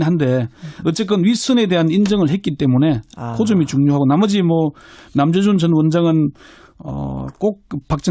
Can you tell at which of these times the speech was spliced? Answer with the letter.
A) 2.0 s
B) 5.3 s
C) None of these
A